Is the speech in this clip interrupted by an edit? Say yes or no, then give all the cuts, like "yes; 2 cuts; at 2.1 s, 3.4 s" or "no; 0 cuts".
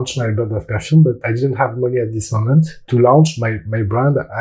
yes; 2 cuts; at 1.2 s, 2.8 s